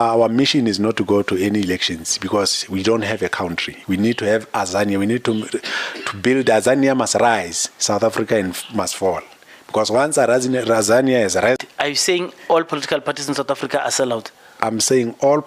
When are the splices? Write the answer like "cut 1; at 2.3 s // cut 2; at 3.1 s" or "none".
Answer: cut 1; at 11.6 s